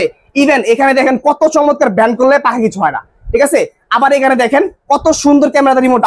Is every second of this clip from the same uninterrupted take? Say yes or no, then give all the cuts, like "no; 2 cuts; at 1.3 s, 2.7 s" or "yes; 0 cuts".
yes; 0 cuts